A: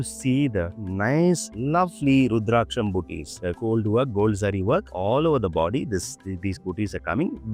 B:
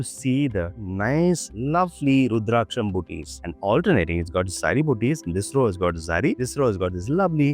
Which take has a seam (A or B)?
B